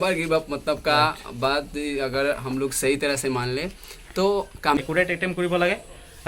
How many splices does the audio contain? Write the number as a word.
one